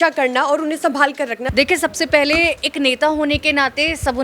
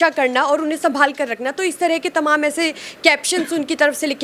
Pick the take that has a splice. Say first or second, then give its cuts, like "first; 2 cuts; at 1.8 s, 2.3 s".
first; 1 cut; at 1.4 s